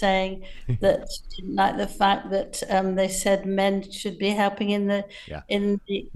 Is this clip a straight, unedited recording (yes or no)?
yes